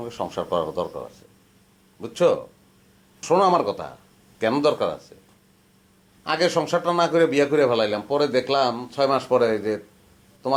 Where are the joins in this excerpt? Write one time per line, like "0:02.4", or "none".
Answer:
none